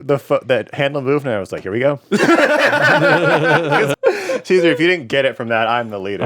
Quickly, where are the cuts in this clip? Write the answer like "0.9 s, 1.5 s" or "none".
3.9 s